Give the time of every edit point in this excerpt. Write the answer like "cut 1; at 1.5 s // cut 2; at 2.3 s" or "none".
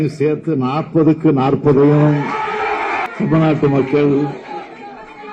cut 1; at 3.1 s